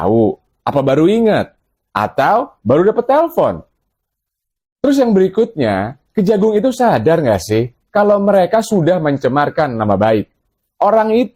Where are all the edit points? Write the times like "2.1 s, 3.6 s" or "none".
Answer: none

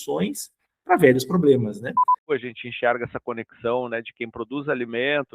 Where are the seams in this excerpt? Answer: 2.3 s

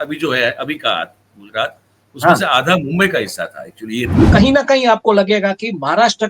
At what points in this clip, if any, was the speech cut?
4.3 s

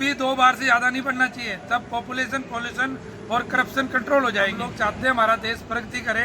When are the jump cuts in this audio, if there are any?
4.7 s

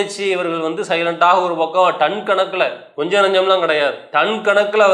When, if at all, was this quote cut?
2.9 s, 4.0 s

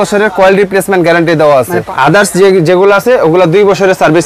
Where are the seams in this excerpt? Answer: 1.8 s

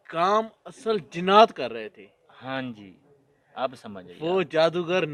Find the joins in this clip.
none

